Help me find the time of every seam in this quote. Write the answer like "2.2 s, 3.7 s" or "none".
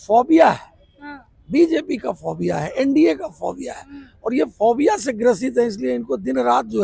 none